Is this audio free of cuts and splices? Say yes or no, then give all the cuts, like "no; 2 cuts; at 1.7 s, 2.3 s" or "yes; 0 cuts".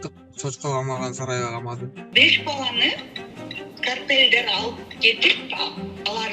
no; 1 cut; at 2.0 s